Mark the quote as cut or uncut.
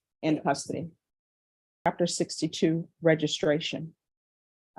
cut